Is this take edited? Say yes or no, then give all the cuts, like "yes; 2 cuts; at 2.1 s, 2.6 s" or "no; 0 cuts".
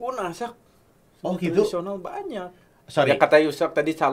no; 0 cuts